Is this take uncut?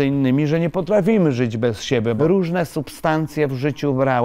no; 1 cut; at 2.2 s

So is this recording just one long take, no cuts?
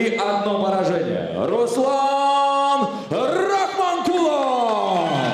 yes; 0 cuts

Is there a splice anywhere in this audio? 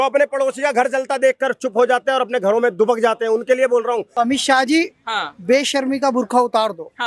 yes; 1 cut; at 4.1 s

